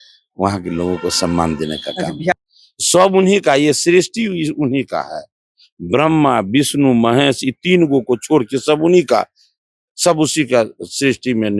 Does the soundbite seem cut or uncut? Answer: cut